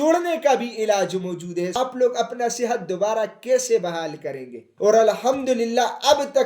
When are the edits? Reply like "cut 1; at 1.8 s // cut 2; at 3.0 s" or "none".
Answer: cut 1; at 1.8 s // cut 2; at 4.7 s